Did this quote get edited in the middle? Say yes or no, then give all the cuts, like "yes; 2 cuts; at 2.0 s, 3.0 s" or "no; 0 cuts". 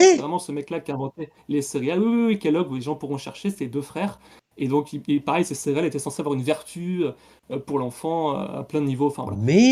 no; 0 cuts